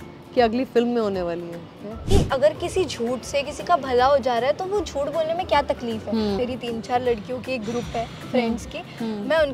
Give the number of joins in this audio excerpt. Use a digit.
2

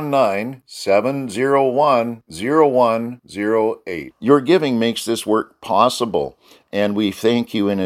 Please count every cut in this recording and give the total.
0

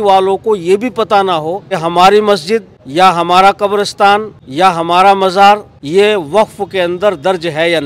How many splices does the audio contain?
4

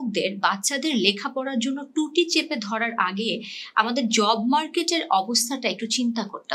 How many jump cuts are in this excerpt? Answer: 0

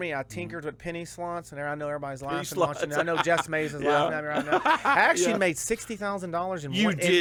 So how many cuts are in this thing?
0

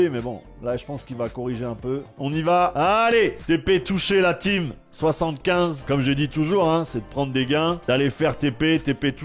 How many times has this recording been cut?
2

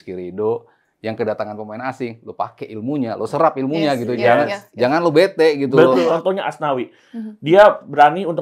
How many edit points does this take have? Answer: 1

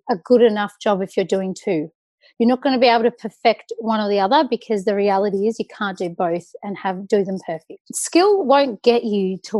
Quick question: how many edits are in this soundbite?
1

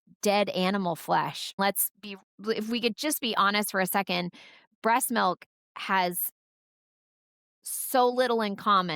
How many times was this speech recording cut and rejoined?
1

